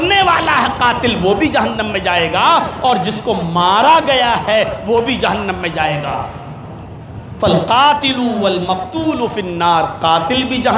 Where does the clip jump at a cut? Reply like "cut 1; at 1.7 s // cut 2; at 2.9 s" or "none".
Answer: none